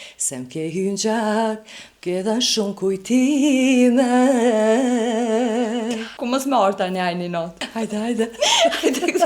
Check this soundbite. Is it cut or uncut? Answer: cut